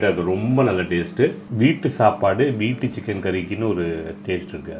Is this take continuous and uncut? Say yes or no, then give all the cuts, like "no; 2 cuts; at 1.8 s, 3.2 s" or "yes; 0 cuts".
no; 1 cut; at 1.4 s